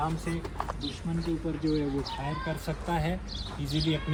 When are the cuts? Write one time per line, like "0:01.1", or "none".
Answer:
none